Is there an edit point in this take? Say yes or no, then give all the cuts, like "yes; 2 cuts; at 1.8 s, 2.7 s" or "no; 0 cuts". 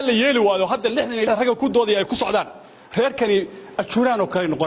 yes; 1 cut; at 1.3 s